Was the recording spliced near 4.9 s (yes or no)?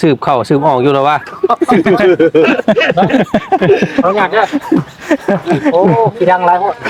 no